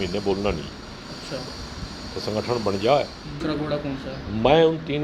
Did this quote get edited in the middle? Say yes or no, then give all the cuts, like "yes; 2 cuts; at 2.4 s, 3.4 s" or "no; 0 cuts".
yes; 1 cut; at 3.4 s